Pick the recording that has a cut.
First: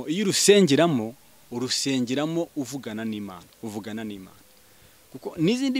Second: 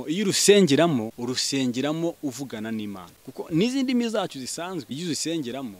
second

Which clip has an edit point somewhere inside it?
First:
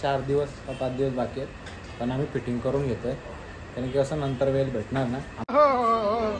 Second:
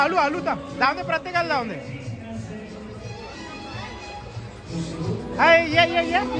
first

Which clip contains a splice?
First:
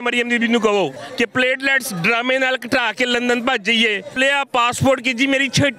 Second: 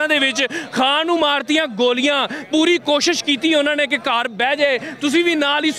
first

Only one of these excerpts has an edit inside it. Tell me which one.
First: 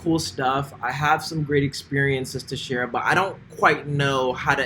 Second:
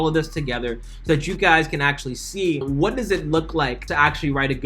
second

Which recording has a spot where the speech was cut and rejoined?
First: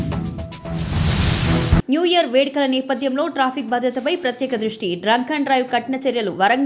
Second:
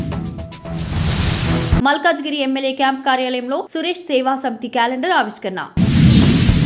first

